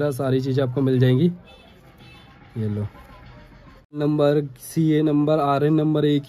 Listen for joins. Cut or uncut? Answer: cut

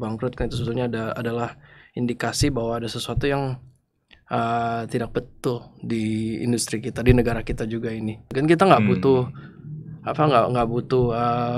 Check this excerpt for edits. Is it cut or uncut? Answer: cut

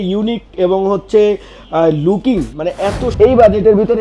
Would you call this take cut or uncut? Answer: cut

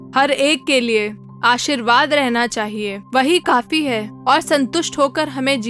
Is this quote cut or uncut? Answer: cut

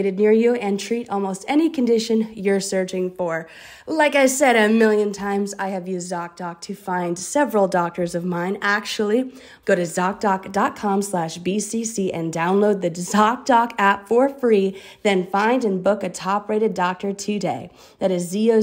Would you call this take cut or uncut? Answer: cut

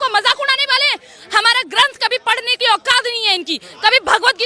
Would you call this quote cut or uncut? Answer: uncut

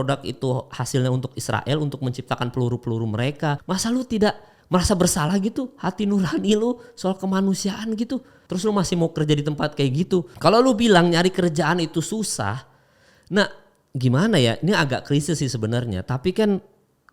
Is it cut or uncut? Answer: uncut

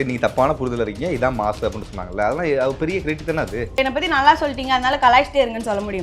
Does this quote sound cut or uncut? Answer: cut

